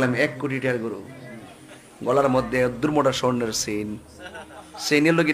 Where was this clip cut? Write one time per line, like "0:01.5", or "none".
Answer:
none